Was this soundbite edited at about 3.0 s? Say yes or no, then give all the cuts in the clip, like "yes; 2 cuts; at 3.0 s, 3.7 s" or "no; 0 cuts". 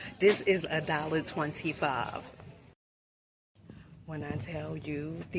yes; 1 cut; at 3.0 s